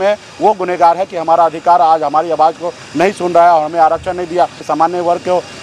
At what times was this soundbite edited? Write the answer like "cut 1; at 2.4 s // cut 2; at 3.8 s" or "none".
cut 1; at 4.6 s

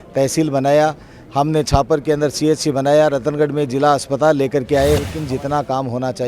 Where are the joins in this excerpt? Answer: cut 1; at 5.2 s

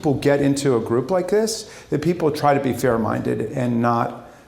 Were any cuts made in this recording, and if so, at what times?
none

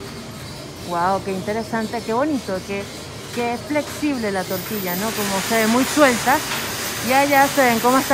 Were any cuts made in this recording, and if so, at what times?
none

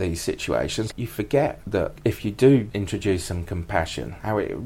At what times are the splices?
cut 1; at 0.9 s // cut 2; at 1.9 s // cut 3; at 2.7 s

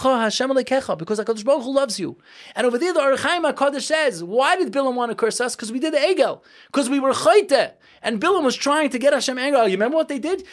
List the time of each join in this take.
none

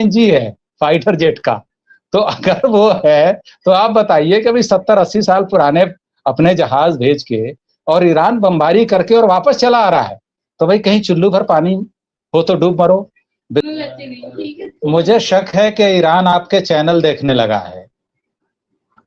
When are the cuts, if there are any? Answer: cut 1; at 13.6 s

